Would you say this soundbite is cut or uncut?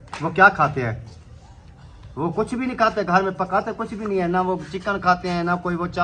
uncut